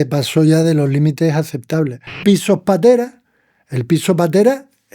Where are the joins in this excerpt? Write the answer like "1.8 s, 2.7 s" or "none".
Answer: 2.2 s